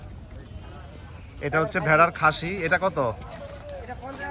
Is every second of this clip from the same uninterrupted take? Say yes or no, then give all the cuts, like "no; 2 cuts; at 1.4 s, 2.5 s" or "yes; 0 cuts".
yes; 0 cuts